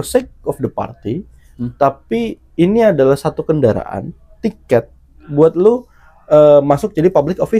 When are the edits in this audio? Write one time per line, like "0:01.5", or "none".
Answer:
none